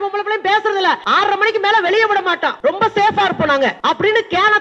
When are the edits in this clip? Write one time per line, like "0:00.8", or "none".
0:01.0
0:02.5
0:03.8